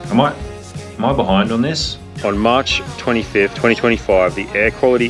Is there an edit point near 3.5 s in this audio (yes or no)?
no